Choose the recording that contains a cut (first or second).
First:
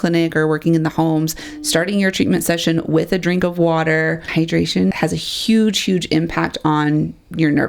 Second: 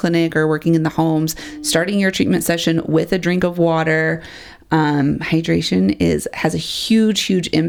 first